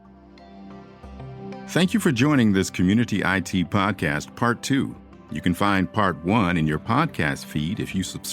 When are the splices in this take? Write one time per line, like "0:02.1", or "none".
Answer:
0:01.0